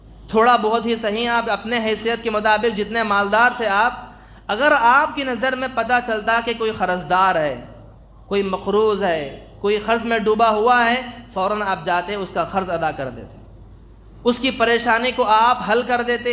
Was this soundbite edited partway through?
no; 0 cuts

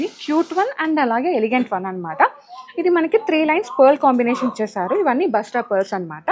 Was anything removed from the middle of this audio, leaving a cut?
no; 0 cuts

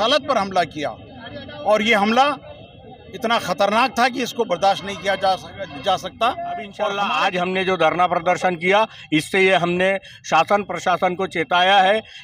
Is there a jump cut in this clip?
yes; 1 cut; at 6.9 s

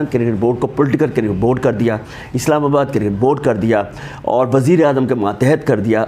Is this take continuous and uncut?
yes; 0 cuts

